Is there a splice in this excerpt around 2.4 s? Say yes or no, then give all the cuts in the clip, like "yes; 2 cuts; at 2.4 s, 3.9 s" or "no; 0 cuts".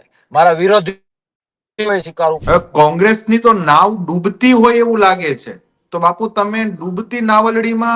yes; 1 cut; at 2.4 s